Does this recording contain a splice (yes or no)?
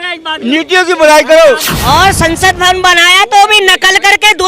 yes